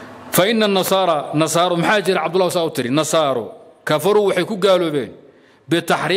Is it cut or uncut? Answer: uncut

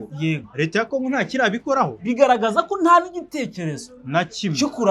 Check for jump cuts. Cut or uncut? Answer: cut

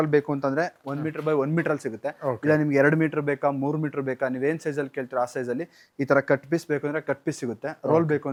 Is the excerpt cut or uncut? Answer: uncut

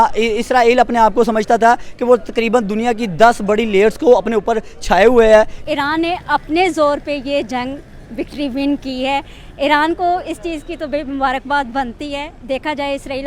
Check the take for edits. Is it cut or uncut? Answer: cut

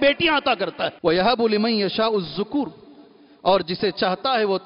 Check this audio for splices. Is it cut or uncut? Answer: cut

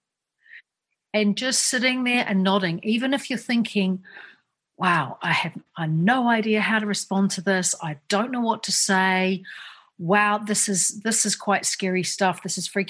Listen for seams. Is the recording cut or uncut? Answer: uncut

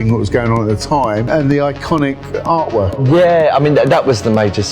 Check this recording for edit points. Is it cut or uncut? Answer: cut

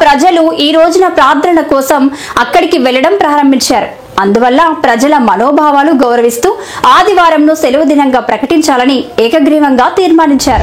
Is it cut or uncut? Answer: uncut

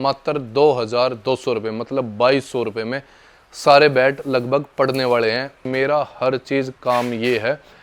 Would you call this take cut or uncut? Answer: cut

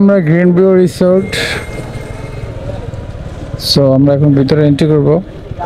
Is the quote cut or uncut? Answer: uncut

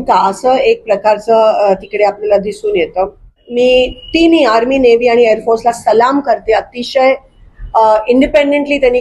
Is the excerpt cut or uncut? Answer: cut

